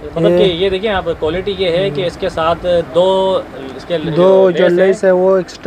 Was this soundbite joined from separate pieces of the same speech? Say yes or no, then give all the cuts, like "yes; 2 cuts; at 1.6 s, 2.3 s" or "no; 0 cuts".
no; 0 cuts